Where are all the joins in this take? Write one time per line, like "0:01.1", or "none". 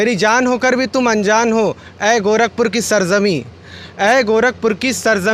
none